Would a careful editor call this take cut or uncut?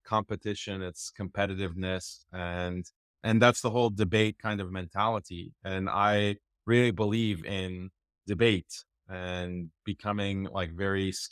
cut